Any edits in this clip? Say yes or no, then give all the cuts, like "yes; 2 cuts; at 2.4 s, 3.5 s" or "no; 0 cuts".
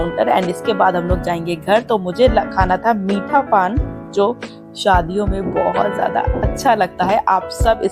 no; 0 cuts